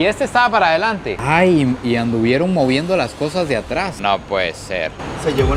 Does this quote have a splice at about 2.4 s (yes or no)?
no